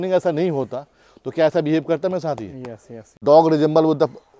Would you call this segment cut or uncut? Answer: cut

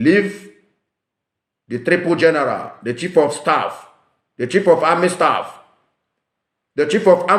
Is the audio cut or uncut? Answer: uncut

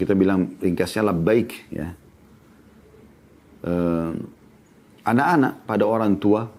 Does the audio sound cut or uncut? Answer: uncut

